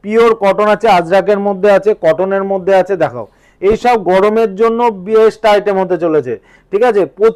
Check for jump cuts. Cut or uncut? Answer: uncut